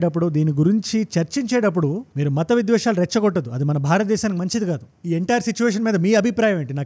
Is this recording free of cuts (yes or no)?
yes